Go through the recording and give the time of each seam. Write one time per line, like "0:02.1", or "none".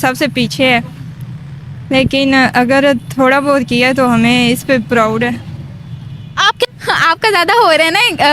0:06.7